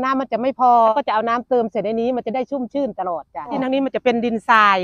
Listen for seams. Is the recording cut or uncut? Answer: cut